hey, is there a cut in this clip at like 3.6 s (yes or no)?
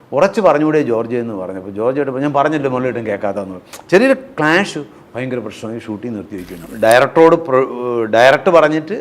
no